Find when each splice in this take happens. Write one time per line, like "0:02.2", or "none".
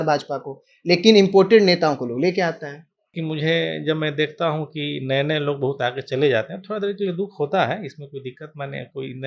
0:03.1